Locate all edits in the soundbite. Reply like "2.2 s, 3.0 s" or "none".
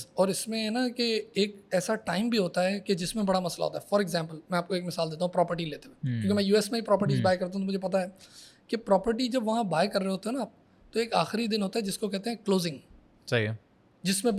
none